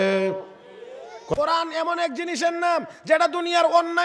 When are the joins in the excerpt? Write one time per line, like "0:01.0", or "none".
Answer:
0:01.2